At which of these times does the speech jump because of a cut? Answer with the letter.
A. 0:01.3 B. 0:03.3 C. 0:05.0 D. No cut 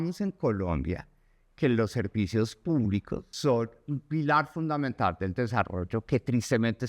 B